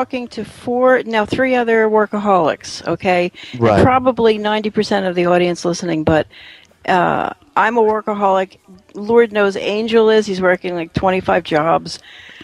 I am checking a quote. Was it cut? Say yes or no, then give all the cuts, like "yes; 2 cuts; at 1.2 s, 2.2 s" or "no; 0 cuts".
no; 0 cuts